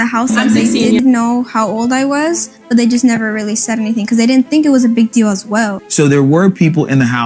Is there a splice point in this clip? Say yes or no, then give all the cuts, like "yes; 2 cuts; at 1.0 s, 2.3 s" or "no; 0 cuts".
yes; 2 cuts; at 1.0 s, 5.8 s